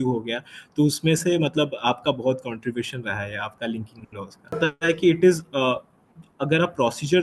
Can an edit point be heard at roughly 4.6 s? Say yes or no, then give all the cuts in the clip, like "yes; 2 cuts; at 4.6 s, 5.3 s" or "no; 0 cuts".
yes; 1 cut; at 4.6 s